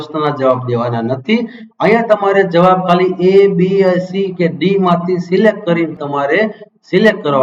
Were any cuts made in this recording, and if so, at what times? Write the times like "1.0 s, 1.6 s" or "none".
6.0 s